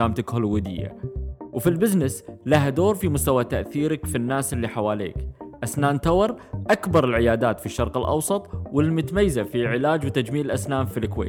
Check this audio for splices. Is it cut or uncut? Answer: uncut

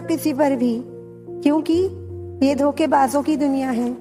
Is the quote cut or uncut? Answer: uncut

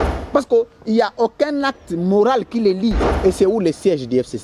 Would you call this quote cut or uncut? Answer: cut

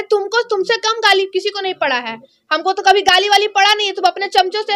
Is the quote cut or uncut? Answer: uncut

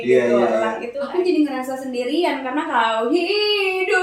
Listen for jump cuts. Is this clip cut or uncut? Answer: cut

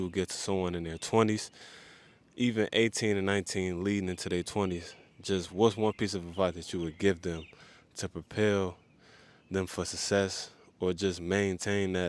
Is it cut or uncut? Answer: uncut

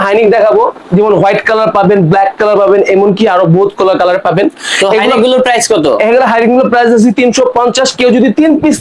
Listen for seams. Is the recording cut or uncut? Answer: uncut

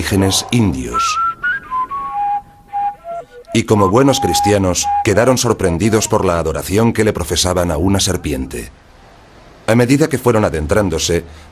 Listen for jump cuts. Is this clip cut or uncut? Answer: cut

